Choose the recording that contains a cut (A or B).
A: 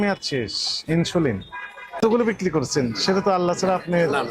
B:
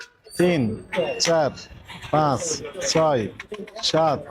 A